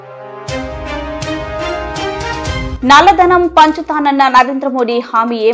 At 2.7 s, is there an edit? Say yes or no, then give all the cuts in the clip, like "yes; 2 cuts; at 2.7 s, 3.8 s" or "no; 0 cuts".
yes; 1 cut; at 2.7 s